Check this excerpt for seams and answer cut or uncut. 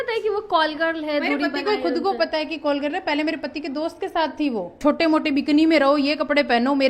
cut